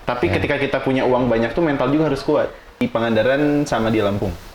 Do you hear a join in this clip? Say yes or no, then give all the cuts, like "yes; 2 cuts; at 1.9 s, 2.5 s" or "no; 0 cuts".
yes; 1 cut; at 2.9 s